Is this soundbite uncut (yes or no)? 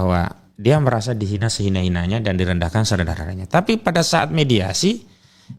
yes